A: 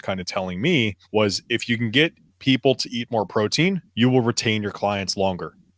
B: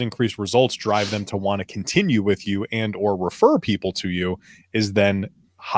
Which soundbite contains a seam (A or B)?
A